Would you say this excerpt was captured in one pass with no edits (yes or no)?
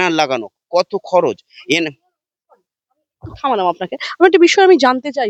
yes